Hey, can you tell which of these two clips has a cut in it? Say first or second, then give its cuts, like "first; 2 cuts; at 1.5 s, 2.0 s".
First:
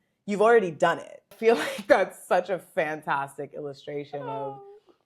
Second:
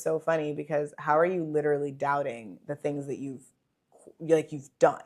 first; 1 cut; at 1.3 s